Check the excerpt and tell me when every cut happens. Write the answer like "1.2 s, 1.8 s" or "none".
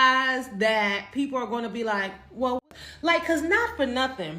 2.6 s

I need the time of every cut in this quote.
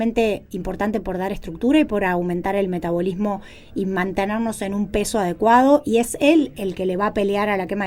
none

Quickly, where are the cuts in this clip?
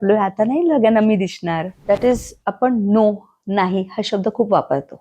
1.7 s

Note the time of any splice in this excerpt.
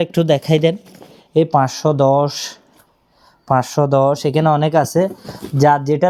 none

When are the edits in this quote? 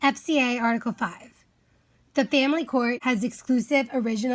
3.0 s

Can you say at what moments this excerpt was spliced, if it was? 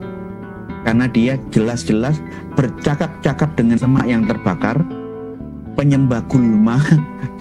none

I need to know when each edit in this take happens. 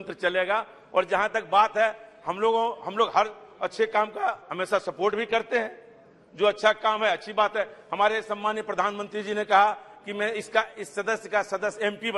none

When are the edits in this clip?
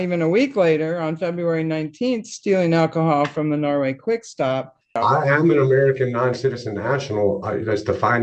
4.9 s

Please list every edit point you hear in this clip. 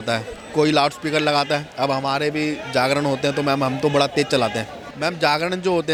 none

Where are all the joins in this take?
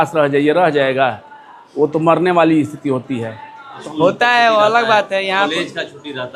3.7 s

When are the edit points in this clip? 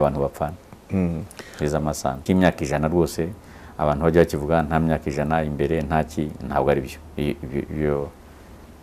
2.2 s

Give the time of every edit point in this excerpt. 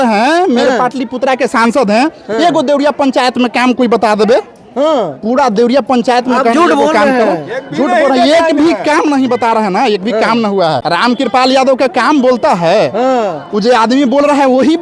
10.8 s

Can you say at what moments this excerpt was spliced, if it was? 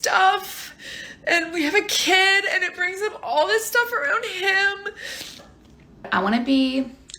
6.1 s

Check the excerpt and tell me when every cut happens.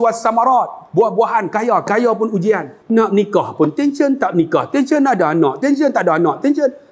2.7 s

